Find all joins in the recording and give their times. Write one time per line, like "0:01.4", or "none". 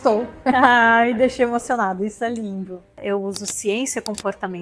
0:03.0